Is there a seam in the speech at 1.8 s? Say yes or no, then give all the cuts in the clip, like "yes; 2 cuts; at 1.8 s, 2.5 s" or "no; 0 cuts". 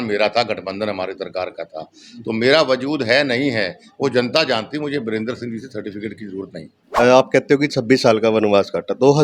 no; 1 cut; at 6.8 s